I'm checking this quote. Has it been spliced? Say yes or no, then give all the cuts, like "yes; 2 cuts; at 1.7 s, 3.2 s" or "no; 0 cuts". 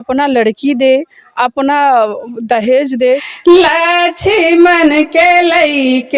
yes; 1 cut; at 3.3 s